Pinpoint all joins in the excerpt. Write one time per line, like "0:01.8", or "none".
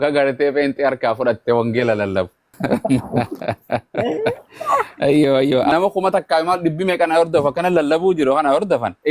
0:02.5
0:05.7